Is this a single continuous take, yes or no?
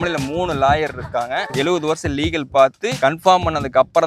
no